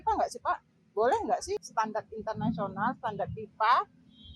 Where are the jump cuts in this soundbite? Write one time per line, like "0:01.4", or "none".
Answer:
0:01.7

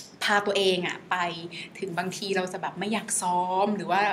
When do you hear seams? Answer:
none

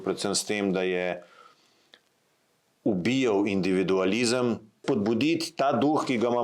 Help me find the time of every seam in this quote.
0:04.8

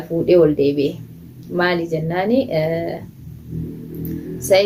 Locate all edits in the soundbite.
none

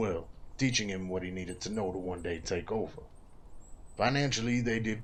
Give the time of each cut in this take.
none

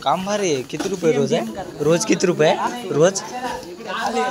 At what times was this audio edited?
none

